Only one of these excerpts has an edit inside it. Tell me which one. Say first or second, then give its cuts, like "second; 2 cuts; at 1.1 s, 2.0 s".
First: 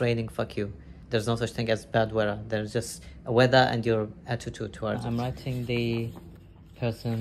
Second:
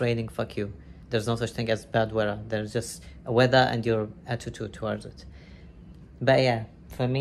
first; 1 cut; at 5.0 s